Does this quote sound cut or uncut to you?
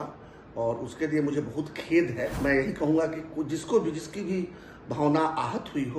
cut